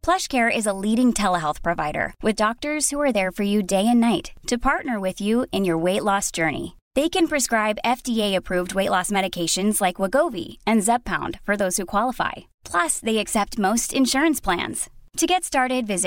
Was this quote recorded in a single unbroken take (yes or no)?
yes